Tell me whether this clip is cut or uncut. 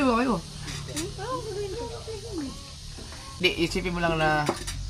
cut